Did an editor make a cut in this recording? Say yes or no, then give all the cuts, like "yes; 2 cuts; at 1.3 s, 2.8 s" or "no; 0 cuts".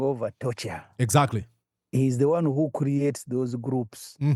no; 0 cuts